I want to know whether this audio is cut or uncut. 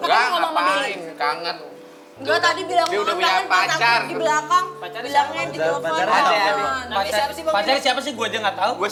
uncut